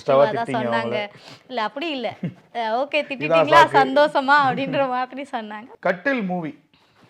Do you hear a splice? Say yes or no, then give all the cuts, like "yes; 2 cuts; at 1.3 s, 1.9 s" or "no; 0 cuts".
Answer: yes; 1 cut; at 5.6 s